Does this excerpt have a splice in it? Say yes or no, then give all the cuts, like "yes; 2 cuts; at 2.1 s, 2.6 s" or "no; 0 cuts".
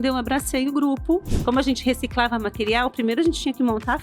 yes; 1 cut; at 1.3 s